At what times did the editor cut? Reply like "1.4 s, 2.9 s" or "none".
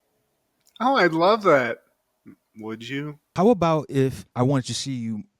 3.3 s